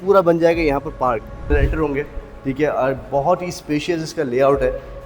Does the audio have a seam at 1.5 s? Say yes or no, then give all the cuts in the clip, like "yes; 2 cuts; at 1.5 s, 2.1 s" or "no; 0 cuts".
yes; 1 cut; at 1.5 s